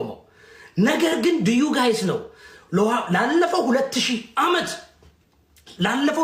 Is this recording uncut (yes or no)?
yes